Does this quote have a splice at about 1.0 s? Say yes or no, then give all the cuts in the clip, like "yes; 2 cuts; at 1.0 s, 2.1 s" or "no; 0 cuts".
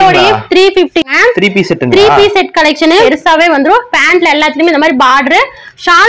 yes; 2 cuts; at 1.0 s, 3.0 s